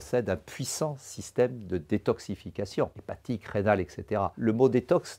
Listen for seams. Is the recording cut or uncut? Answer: cut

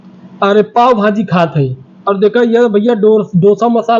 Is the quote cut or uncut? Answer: uncut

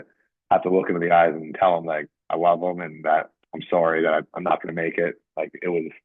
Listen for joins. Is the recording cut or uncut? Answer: uncut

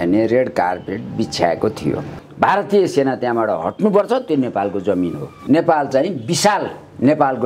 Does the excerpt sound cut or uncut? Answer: cut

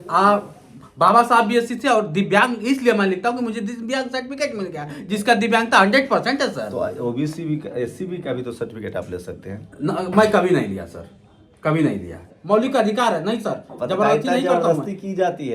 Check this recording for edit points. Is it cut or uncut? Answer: cut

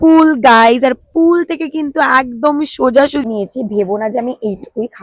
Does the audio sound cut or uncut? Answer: cut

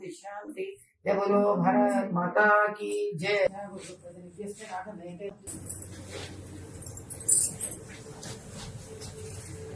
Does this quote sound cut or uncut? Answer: cut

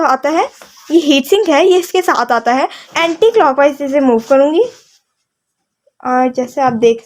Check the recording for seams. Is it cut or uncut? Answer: cut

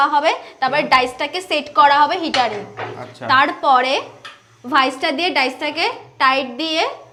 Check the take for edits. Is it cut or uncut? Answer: uncut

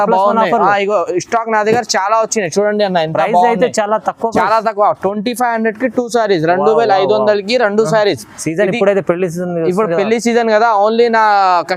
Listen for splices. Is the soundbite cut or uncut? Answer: uncut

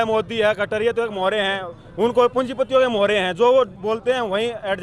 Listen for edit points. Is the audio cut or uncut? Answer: uncut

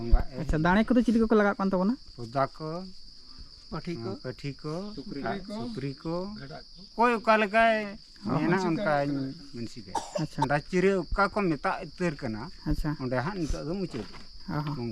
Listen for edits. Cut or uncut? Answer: cut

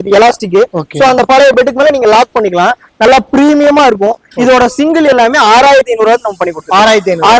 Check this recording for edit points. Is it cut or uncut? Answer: uncut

